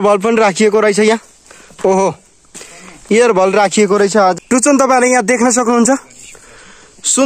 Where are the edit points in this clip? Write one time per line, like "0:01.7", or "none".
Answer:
0:04.3